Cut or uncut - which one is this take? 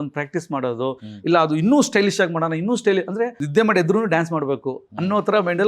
cut